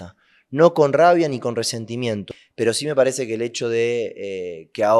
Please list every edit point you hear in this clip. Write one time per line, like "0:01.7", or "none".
0:02.3